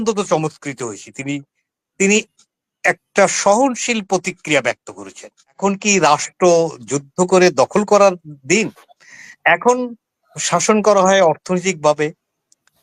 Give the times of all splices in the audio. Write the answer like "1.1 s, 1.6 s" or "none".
5.6 s